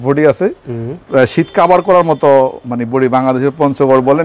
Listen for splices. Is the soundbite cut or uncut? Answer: uncut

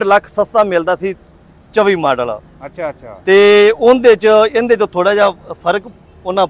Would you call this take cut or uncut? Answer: uncut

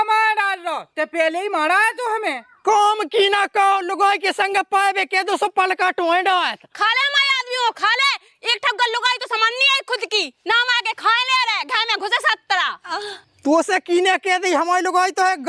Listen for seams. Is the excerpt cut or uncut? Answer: uncut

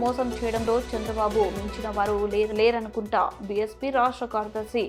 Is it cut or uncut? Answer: uncut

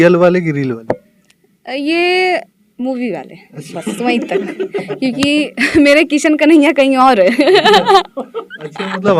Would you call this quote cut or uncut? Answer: uncut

